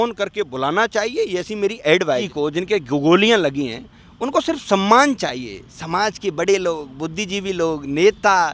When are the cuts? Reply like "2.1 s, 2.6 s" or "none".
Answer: 2.3 s